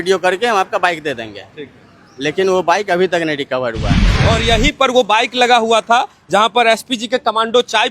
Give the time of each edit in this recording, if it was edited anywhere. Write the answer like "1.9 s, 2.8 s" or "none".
4.1 s